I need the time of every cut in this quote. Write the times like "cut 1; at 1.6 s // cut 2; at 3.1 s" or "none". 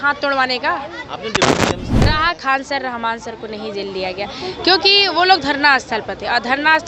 cut 1; at 2.1 s